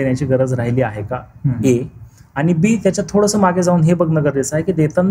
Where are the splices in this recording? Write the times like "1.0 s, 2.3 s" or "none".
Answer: none

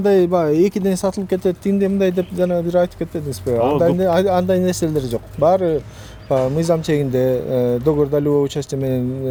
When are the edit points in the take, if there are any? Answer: none

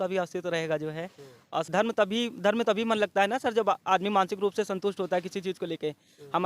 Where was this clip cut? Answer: 1.7 s

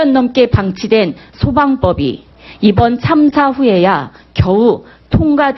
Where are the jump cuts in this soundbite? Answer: 4.1 s

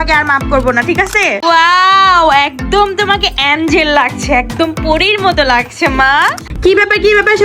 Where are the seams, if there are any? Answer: 1.4 s, 6.5 s

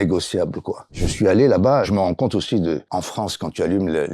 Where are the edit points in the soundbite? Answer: 1.0 s, 1.9 s, 2.8 s

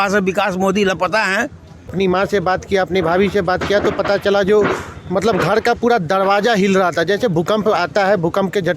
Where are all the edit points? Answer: 1.9 s

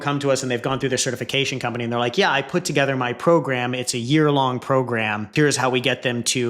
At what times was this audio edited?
5.3 s

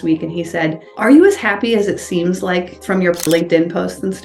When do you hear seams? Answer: none

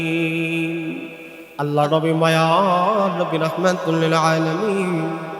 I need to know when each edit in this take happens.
1.5 s

